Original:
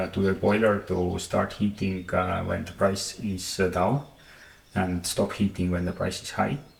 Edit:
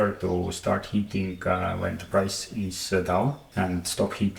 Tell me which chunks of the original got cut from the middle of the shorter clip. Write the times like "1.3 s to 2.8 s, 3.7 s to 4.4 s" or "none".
4.1 s to 4.6 s